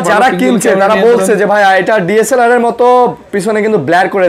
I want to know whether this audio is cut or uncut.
uncut